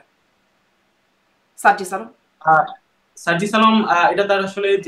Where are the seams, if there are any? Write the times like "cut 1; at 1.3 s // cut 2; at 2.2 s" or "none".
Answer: none